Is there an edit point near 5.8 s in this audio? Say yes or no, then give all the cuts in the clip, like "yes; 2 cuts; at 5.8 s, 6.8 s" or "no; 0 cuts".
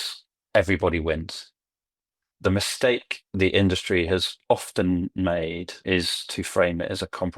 yes; 2 cuts; at 2.2 s, 5.8 s